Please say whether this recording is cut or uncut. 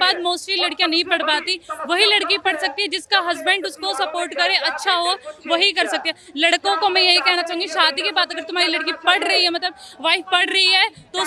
uncut